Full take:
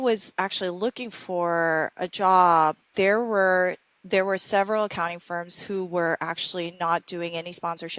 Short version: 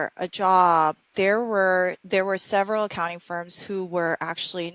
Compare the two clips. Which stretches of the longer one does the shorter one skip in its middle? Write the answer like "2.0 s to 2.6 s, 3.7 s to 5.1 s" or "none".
3.8 s to 4.0 s